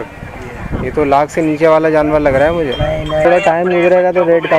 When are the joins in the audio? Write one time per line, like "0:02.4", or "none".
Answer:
0:03.2